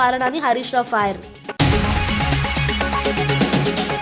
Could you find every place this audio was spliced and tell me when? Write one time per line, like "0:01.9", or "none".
0:01.4